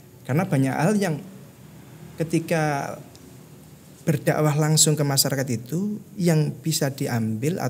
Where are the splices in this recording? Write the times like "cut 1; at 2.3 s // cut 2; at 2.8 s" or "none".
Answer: none